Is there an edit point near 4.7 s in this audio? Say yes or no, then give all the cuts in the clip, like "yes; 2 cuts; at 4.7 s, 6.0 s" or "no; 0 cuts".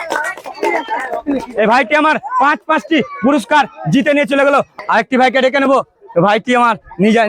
yes; 1 cut; at 4.7 s